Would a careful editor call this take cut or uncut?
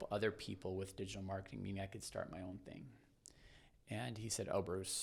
uncut